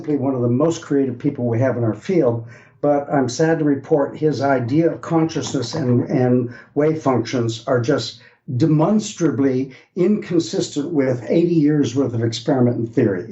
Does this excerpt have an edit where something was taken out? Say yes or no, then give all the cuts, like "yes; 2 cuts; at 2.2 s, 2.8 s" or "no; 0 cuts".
no; 0 cuts